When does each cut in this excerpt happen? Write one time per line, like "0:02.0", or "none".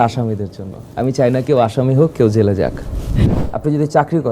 0:03.3